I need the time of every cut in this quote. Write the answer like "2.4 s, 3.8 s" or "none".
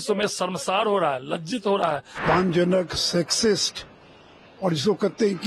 2.1 s